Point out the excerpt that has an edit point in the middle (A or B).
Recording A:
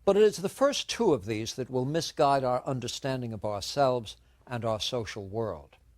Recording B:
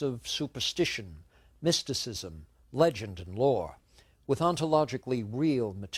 A